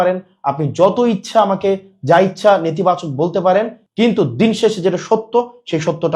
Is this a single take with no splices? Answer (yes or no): yes